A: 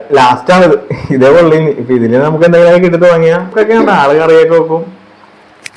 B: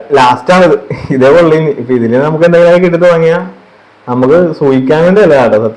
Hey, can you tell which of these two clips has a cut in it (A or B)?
A